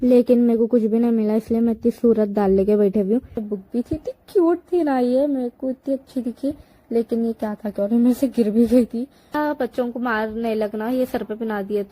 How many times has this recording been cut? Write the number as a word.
two